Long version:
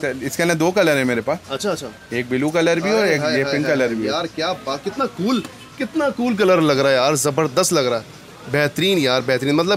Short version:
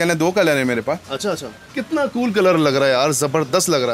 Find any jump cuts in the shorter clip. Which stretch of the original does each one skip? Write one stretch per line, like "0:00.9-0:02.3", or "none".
0:02.0-0:05.6